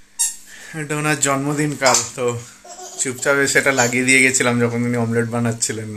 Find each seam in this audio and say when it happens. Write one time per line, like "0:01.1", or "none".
none